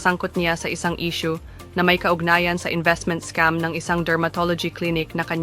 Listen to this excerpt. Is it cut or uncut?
cut